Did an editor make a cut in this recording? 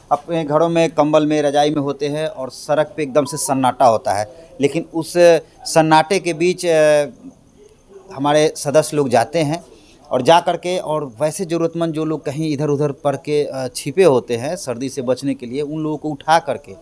no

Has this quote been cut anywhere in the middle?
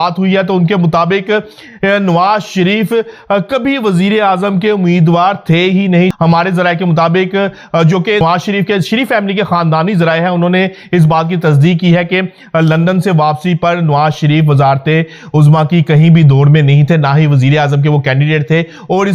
yes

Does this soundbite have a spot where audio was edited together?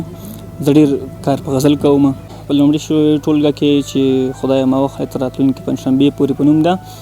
yes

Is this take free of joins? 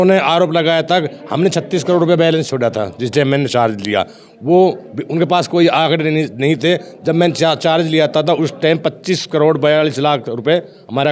yes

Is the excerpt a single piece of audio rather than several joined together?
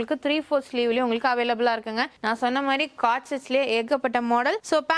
yes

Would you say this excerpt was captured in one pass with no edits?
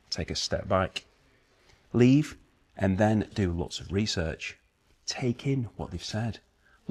yes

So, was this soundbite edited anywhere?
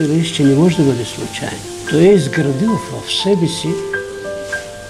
yes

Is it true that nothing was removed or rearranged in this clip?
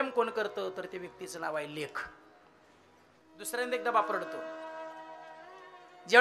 no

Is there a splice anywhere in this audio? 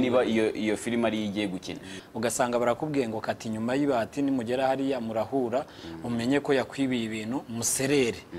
yes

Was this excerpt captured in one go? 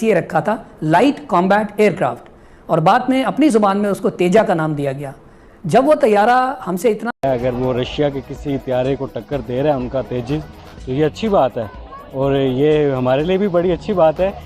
no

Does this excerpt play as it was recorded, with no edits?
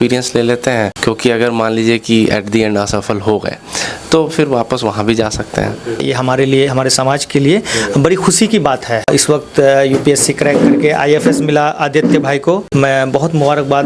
no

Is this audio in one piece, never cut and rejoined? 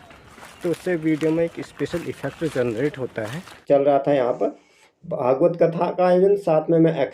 no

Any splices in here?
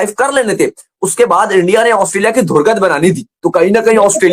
no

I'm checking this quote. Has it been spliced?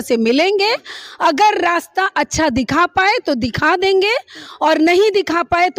no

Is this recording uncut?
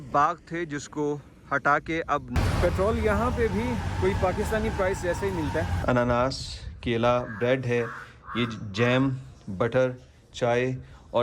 no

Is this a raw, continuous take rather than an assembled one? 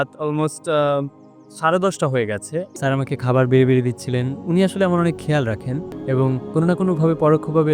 no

